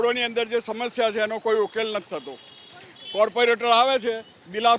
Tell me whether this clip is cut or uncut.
uncut